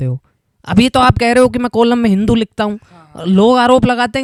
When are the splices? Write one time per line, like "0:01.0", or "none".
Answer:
none